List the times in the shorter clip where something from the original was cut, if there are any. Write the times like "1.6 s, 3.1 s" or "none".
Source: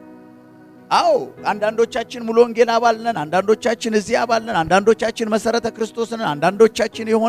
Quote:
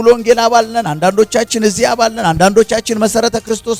none